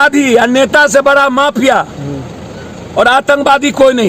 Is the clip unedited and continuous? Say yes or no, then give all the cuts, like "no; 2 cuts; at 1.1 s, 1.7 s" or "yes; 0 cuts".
yes; 0 cuts